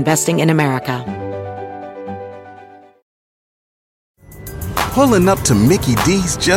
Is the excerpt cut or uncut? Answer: cut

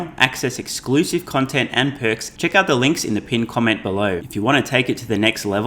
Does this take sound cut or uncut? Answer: cut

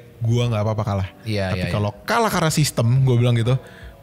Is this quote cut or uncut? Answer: uncut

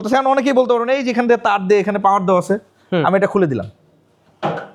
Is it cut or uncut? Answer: uncut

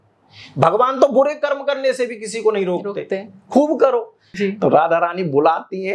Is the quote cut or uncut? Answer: cut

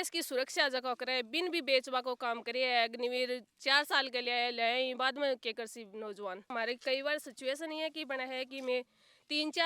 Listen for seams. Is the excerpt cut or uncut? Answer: cut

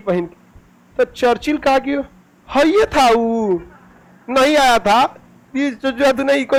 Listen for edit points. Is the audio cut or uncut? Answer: uncut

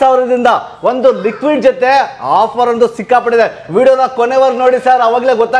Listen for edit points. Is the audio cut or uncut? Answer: uncut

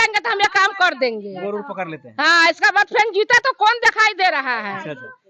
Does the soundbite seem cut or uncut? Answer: uncut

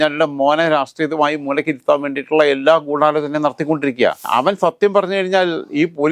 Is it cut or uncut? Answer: cut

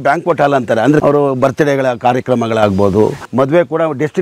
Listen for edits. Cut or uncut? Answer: cut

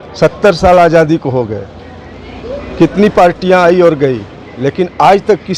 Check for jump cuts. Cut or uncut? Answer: uncut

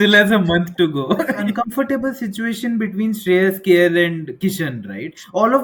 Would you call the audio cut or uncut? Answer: cut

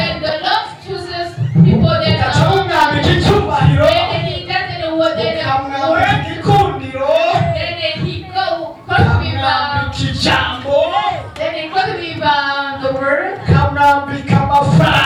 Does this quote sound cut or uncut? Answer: uncut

